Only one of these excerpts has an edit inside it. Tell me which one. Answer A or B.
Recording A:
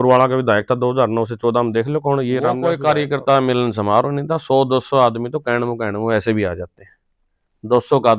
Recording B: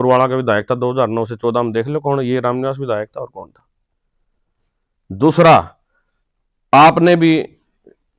A